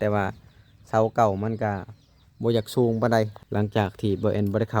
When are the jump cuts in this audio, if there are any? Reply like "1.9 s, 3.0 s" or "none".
3.4 s